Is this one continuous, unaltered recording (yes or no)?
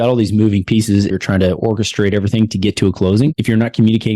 no